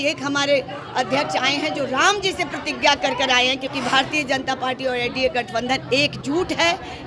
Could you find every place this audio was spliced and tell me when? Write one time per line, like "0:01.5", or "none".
0:03.7